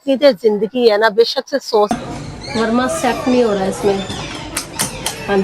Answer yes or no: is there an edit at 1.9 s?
yes